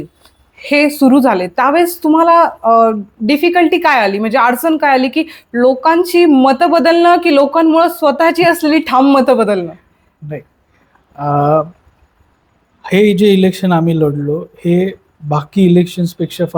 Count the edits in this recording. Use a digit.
0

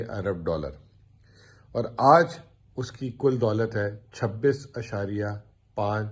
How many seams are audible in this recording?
0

